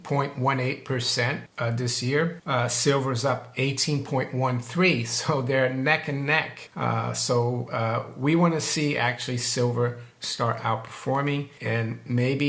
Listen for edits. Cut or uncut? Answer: cut